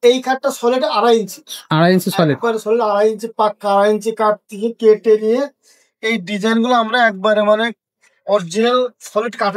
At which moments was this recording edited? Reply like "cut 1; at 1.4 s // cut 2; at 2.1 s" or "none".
none